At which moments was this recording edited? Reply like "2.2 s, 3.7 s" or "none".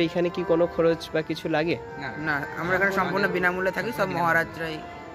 none